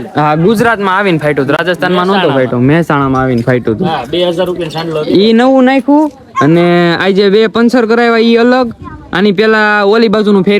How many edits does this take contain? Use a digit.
0